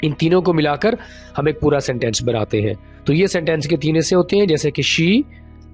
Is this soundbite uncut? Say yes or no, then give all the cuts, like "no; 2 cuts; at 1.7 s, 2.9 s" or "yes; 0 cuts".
yes; 0 cuts